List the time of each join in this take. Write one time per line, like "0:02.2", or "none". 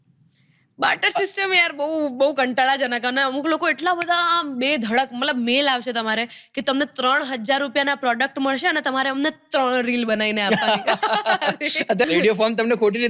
0:12.0

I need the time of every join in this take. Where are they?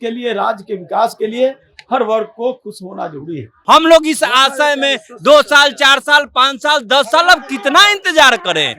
0:03.5

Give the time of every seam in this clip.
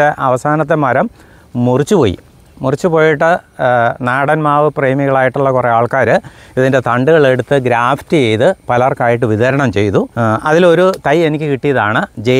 0:10.1

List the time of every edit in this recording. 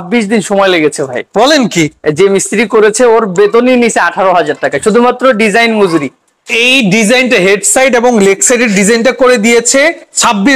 none

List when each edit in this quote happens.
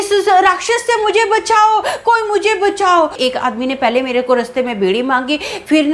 0:03.2

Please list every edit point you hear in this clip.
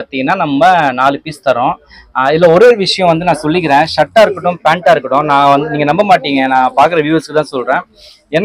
none

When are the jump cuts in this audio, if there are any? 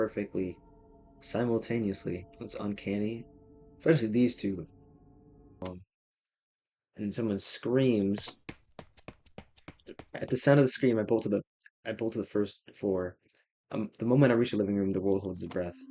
0:05.6

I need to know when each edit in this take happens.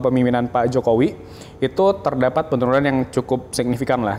none

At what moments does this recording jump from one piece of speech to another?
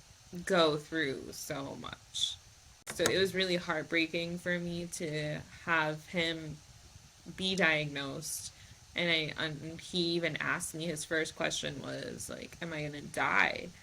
0:02.8

